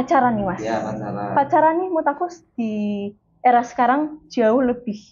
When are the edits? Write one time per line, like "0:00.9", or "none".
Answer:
none